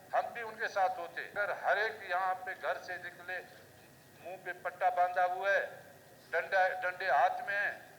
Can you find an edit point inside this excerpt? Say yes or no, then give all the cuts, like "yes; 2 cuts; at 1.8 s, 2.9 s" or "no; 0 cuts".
yes; 1 cut; at 1.3 s